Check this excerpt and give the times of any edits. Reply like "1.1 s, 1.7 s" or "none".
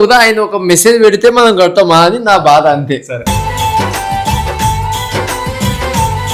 none